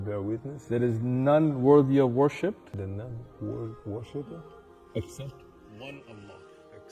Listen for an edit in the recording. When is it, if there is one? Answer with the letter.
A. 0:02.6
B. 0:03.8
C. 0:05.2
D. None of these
D